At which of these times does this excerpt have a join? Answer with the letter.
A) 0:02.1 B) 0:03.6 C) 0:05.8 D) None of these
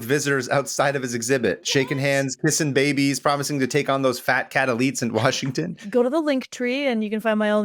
C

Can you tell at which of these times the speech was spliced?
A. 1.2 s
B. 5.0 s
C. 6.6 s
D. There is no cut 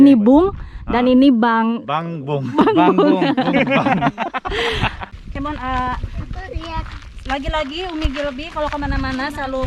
B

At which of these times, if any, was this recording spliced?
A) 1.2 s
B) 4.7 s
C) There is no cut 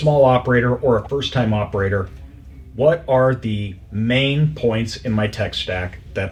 C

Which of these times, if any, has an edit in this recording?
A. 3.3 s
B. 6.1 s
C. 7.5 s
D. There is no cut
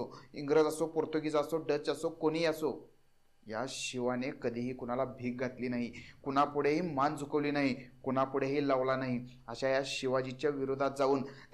D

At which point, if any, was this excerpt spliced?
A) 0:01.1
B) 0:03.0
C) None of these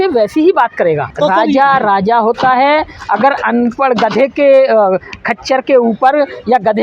A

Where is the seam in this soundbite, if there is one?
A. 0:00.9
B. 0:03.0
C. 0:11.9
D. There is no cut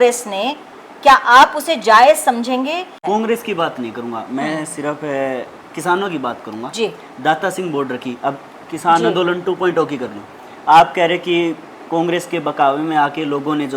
B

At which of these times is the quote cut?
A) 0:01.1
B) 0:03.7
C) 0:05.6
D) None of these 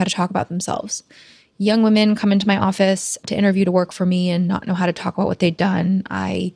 A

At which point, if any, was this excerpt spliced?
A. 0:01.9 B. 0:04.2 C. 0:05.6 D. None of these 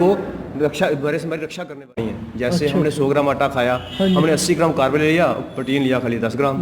A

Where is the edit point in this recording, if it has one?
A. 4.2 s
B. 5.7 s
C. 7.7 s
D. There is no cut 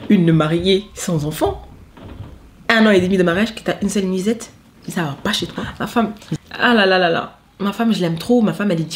B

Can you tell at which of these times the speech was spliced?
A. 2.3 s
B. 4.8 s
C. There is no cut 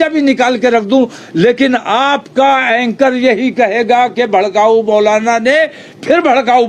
C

